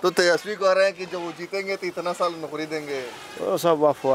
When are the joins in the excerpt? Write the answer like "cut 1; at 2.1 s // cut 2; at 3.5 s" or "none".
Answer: none